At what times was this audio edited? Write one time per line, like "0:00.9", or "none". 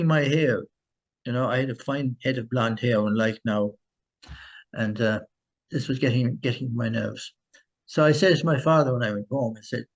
none